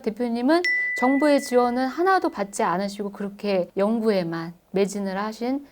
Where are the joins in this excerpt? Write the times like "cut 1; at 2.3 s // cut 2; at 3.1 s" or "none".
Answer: cut 1; at 3.7 s